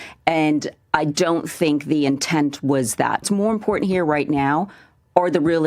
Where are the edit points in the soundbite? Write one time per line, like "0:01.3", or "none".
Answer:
0:03.3